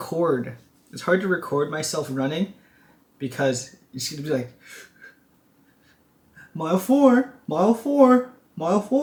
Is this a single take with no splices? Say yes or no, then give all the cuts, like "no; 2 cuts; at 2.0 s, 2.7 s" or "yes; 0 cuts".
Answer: yes; 0 cuts